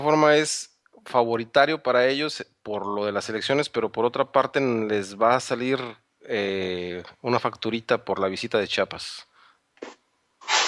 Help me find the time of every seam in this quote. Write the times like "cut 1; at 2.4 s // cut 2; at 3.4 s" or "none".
cut 1; at 1.1 s